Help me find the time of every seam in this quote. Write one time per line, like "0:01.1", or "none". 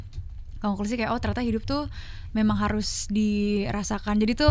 none